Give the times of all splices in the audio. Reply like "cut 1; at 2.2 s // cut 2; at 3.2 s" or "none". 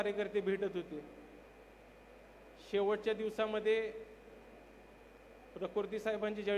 cut 1; at 1.4 s